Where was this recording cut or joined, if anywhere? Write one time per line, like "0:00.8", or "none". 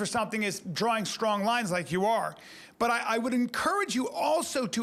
none